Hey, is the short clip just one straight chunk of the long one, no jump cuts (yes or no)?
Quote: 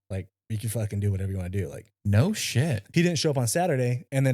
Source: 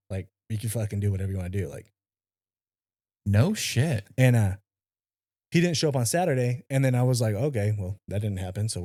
no